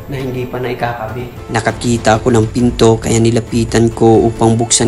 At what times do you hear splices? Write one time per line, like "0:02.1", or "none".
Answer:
0:01.4